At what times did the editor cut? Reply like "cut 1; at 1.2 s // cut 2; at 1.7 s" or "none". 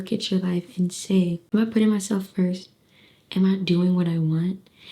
cut 1; at 1.4 s